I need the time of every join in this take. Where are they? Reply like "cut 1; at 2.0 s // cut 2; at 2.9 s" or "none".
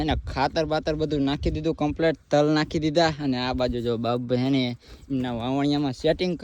none